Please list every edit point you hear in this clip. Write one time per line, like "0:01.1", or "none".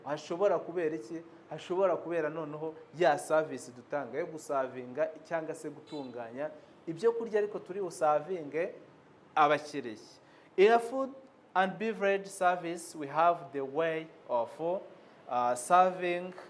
none